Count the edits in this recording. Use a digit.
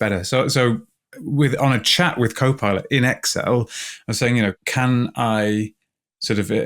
1